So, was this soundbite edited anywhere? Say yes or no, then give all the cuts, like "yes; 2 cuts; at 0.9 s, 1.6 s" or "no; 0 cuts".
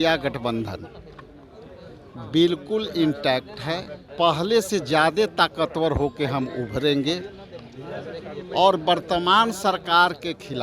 yes; 1 cut; at 4.1 s